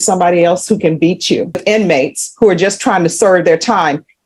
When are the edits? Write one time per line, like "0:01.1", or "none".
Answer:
0:01.6